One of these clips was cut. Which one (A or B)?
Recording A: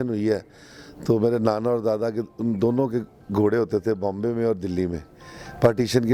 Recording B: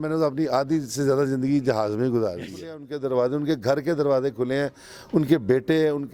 B